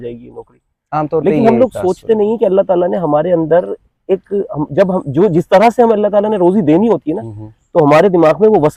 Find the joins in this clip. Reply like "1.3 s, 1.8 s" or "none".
none